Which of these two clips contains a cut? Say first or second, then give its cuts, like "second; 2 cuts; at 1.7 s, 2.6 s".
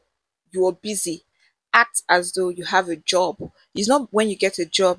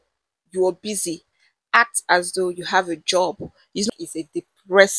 second; 1 cut; at 3.9 s